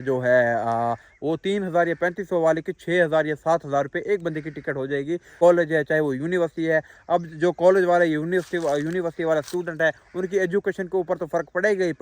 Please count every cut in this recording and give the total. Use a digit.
1